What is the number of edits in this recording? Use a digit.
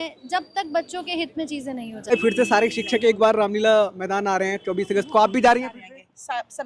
1